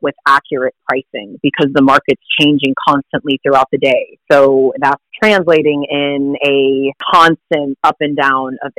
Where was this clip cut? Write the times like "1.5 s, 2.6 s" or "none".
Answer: 4.1 s, 5.1 s, 7.0 s, 7.7 s